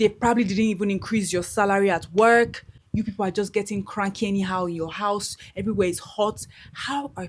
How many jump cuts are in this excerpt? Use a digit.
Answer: 0